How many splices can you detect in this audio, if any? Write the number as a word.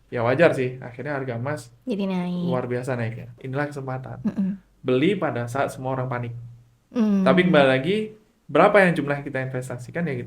one